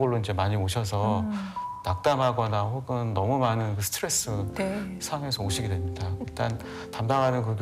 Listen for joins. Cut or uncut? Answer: cut